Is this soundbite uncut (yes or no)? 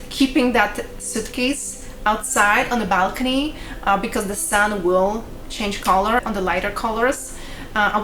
yes